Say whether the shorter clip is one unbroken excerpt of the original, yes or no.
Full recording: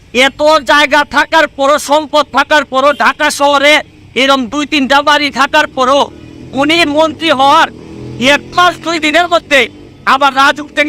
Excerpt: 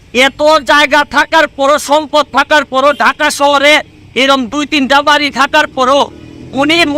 yes